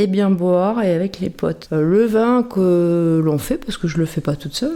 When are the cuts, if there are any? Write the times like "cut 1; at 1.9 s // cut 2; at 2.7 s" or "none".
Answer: cut 1; at 1.5 s